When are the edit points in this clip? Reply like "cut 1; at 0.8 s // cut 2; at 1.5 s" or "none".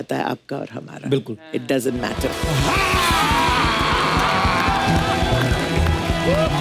cut 1; at 2.4 s